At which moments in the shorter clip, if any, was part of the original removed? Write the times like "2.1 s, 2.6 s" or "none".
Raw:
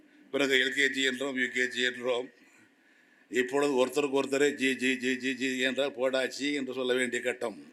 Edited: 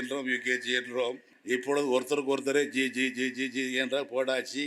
1.3 s